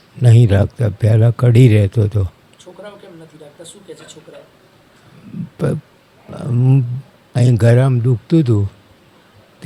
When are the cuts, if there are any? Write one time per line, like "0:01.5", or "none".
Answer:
none